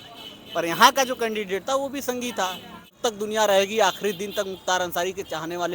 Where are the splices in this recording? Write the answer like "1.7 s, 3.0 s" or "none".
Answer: 3.0 s